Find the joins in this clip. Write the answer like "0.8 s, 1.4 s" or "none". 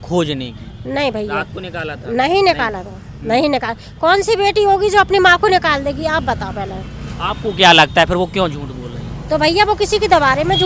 none